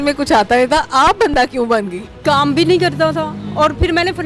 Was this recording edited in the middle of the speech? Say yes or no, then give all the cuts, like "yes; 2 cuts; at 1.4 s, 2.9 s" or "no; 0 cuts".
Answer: yes; 1 cut; at 2.2 s